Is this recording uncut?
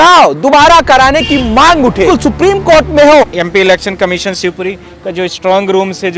no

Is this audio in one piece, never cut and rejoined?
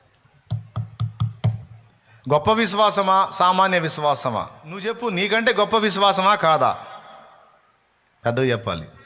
no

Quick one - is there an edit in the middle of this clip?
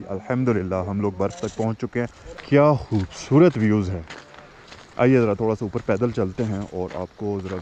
yes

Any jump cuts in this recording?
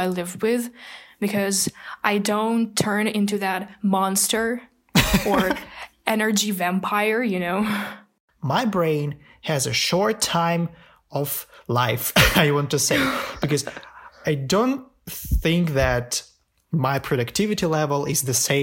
yes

